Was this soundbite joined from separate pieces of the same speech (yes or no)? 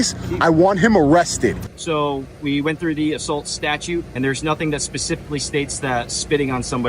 yes